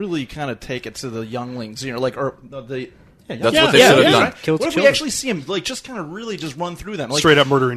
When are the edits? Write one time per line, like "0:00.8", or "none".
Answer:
none